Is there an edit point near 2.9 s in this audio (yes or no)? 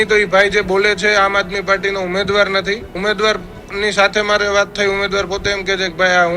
yes